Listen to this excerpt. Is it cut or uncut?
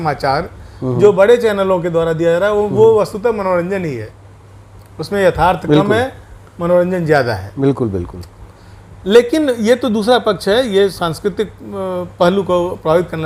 uncut